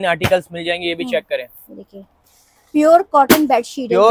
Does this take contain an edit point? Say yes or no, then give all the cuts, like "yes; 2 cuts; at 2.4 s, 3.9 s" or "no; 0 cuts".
no; 0 cuts